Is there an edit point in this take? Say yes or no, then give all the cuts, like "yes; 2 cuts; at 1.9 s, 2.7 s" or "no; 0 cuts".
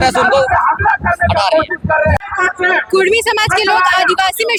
no; 0 cuts